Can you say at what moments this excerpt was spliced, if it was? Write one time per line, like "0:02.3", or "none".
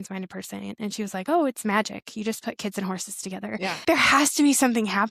0:03.8